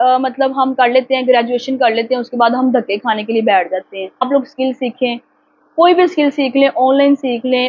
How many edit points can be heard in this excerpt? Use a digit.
1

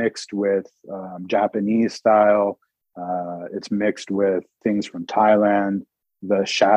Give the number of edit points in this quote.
1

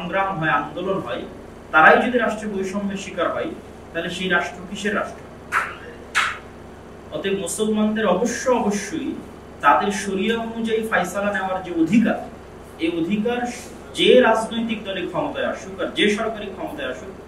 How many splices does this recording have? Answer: 0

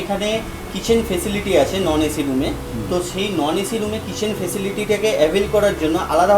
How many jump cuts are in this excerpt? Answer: 0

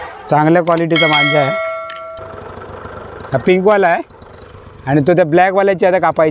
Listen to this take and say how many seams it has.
1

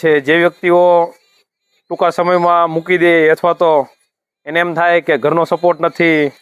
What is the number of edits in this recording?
0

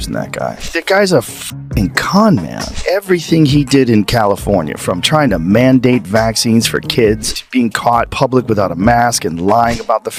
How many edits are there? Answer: 0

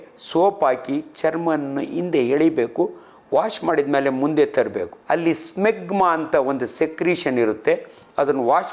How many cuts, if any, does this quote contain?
1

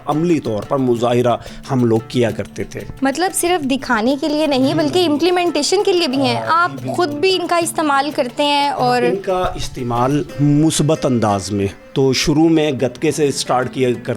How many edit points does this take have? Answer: 0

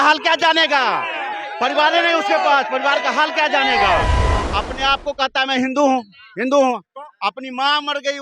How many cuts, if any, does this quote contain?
1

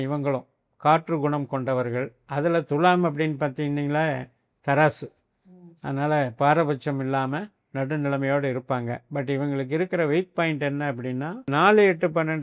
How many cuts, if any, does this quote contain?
1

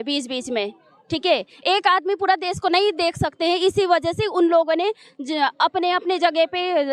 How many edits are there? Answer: 0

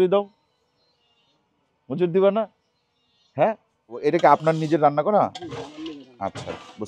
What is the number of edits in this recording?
1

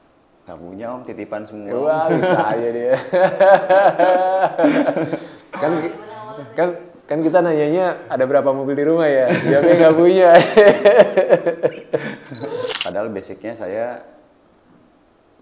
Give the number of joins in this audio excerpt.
1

